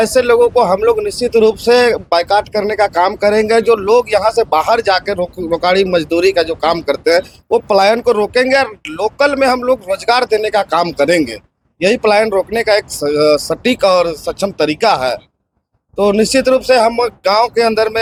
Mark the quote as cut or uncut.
uncut